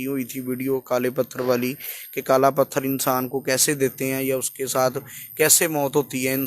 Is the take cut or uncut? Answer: uncut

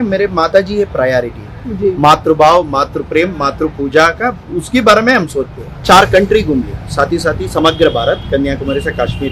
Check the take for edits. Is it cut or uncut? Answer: cut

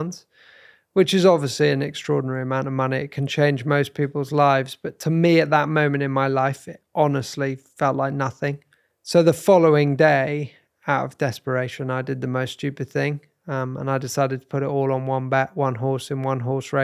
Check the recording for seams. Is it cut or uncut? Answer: uncut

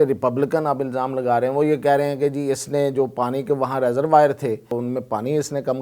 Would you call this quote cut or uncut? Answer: cut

